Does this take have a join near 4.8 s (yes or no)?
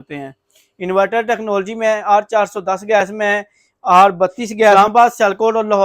yes